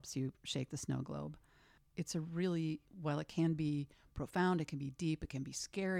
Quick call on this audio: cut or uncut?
uncut